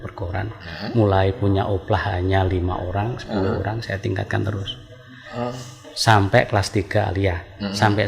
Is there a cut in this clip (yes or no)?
no